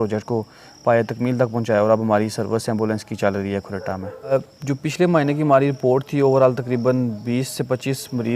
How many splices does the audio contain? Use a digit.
2